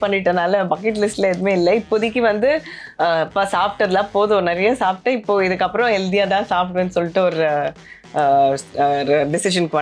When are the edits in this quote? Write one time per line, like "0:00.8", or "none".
none

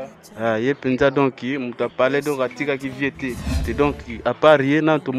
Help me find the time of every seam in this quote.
0:03.7

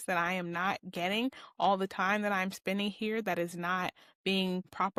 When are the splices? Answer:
none

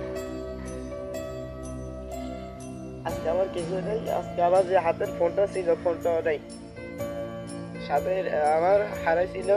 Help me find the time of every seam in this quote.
none

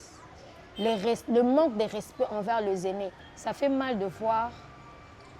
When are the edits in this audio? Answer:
0:03.3

